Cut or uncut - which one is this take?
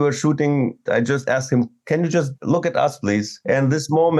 cut